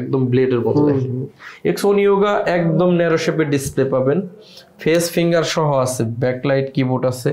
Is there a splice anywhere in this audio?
no; 0 cuts

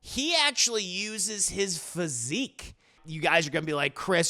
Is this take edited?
yes; 1 cut; at 3.0 s

